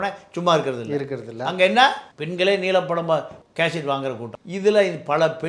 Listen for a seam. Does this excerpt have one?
yes; 2 cuts; at 2.1 s, 4.3 s

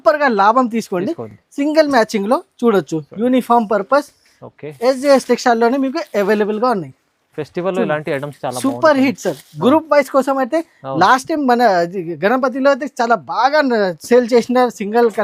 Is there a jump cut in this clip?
no; 0 cuts

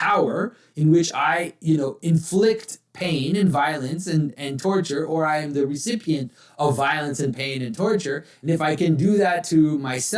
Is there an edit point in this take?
no; 0 cuts

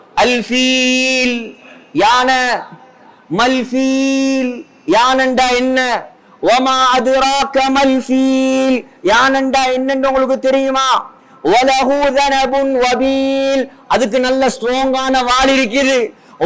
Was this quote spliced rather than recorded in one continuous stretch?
no; 0 cuts

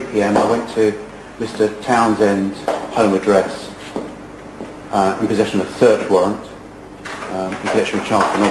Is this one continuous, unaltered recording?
no; 1 cut; at 6.1 s

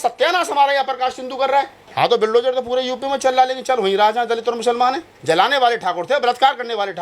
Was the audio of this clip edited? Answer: yes; 2 cuts; at 1.8 s, 5.1 s

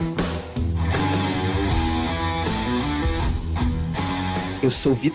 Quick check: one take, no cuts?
yes; 0 cuts

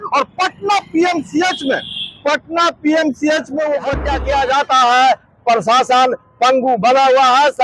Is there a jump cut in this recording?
yes; 1 cut; at 4.1 s

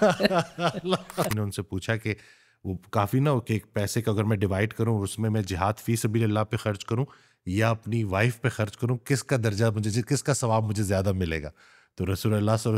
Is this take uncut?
no; 1 cut; at 1.3 s

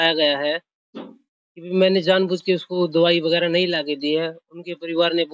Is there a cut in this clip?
no; 0 cuts

